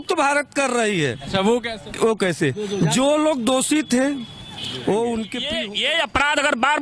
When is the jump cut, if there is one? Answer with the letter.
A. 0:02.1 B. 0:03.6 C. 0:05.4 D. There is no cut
C